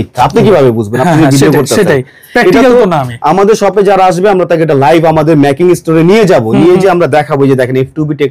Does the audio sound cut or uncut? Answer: uncut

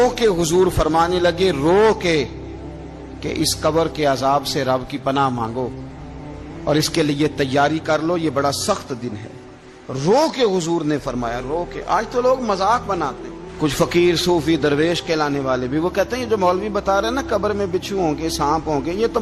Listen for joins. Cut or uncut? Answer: uncut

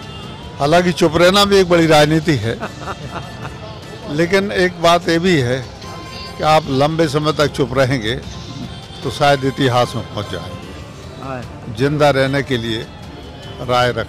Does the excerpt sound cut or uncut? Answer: uncut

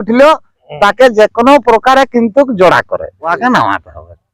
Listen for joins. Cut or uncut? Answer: cut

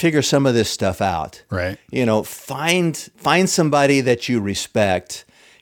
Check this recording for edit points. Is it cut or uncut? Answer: uncut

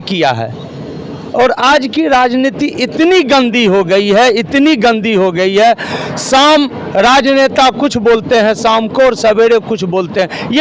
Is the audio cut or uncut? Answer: uncut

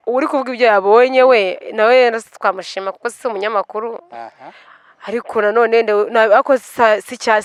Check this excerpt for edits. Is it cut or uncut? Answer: uncut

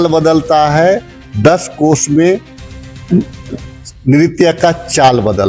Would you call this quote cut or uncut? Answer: uncut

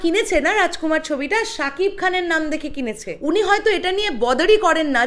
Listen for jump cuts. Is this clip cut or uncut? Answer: cut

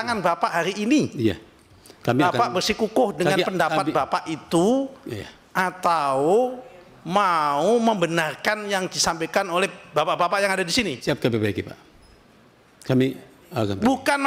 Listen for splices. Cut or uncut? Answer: uncut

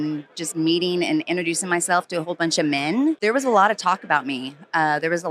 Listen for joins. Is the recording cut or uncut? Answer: cut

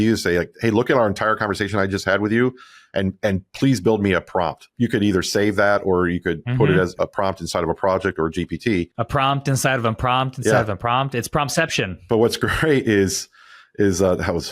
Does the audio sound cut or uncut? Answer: cut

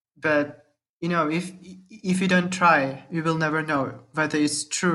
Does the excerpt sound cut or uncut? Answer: uncut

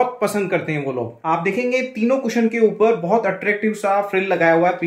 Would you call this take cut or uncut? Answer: uncut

